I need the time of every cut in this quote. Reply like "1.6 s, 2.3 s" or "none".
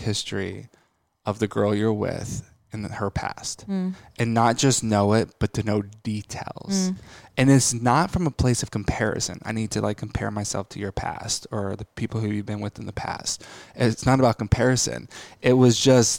none